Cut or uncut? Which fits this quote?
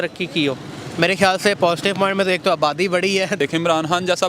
cut